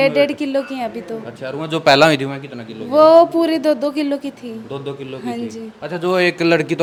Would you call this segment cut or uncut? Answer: uncut